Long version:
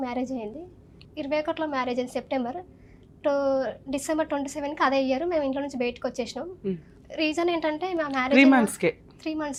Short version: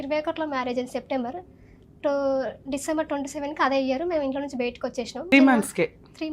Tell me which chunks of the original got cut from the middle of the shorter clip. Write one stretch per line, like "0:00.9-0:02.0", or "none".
0:06.5-0:08.4

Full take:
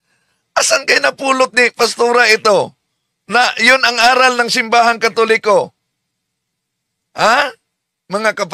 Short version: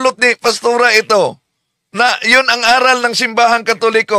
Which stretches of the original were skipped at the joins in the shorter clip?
none

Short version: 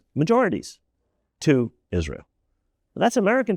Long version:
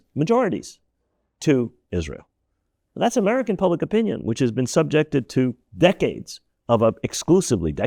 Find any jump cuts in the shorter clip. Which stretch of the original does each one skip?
none

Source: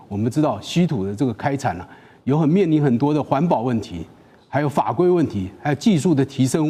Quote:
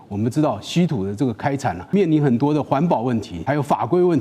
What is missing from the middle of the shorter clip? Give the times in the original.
0:01.9-0:02.5
0:03.9-0:04.4

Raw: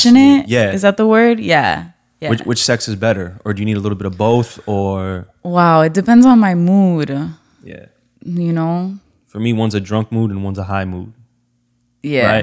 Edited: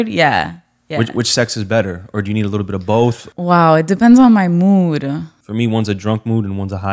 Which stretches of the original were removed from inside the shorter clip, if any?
0:04.6-0:05.3
0:07.4-0:09.2

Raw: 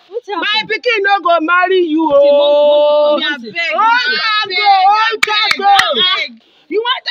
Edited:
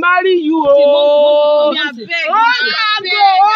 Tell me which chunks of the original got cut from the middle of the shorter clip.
none

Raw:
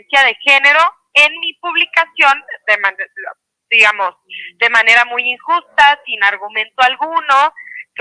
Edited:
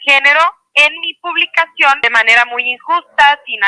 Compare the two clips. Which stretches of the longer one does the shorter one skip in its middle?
0:02.4-0:04.6

